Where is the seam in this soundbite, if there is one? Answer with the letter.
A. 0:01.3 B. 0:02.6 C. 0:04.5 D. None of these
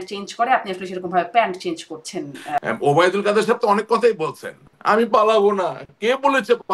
B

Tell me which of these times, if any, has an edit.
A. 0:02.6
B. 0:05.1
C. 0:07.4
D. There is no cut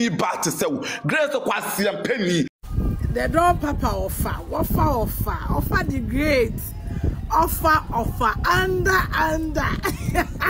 A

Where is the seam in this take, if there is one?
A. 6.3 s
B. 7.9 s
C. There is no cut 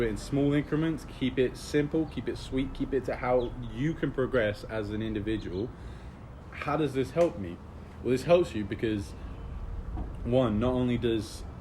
A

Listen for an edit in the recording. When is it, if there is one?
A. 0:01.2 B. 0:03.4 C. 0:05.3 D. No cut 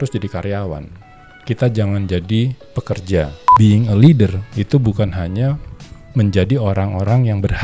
B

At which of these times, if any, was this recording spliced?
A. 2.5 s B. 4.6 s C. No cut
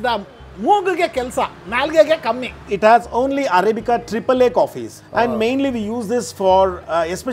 A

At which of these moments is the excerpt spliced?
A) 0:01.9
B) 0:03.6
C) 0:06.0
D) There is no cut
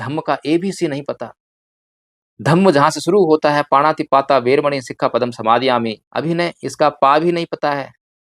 C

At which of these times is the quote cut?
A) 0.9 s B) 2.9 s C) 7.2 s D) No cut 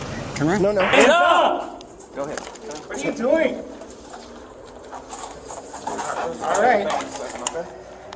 A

